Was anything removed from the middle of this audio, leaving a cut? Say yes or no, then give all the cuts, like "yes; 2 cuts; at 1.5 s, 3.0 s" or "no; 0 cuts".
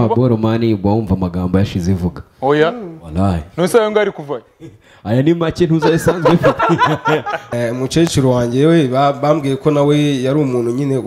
yes; 1 cut; at 7.4 s